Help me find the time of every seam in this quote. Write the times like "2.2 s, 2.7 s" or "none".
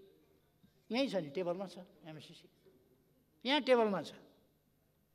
none